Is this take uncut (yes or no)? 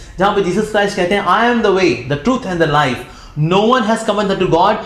yes